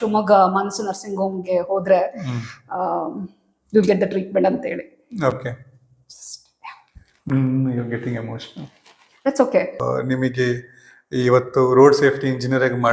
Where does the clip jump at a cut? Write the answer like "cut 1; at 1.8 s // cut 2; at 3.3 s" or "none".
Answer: cut 1; at 9.8 s

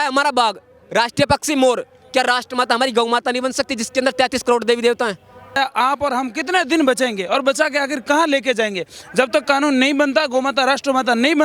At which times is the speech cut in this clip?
cut 1; at 5.6 s

